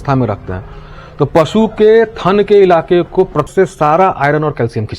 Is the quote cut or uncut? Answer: cut